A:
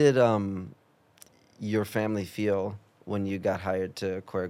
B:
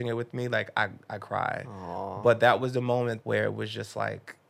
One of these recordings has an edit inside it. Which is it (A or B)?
B